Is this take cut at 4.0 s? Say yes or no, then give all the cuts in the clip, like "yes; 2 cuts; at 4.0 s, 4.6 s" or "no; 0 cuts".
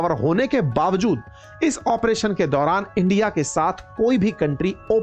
no; 0 cuts